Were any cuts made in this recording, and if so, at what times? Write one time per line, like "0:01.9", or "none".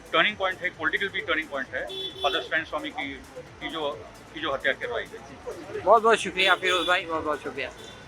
none